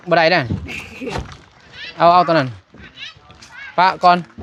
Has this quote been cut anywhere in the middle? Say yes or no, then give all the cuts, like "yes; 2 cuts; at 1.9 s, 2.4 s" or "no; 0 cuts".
no; 0 cuts